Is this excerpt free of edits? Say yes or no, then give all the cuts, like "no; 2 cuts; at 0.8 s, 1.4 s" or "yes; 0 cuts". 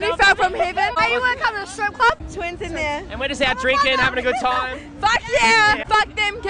no; 2 cuts; at 1.0 s, 2.2 s